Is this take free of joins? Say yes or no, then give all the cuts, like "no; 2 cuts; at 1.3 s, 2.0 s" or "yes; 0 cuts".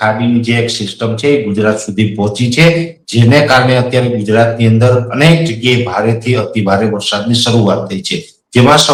yes; 0 cuts